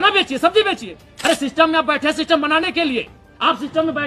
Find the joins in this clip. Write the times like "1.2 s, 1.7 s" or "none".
1.1 s